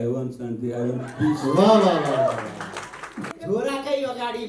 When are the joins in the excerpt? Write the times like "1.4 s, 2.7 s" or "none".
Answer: 3.3 s